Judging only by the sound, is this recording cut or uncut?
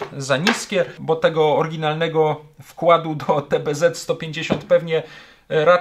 cut